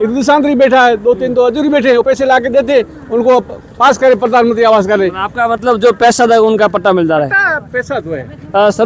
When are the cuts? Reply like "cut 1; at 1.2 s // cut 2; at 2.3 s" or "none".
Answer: none